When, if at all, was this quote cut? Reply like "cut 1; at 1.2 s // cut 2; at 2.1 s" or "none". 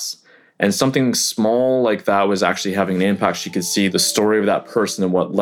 cut 1; at 3.9 s